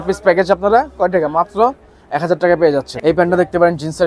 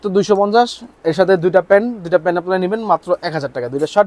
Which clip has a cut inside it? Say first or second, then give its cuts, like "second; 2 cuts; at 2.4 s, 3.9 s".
first; 1 cut; at 2.9 s